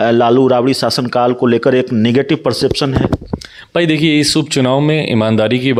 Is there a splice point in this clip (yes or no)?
no